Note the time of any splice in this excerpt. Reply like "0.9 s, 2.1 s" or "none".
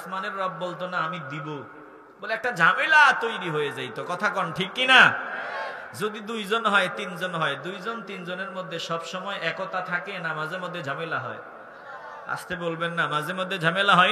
none